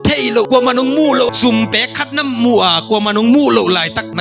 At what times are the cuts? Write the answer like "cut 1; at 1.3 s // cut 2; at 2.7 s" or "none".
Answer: none